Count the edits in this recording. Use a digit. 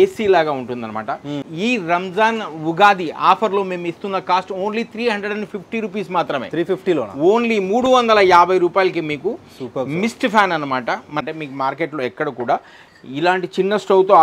2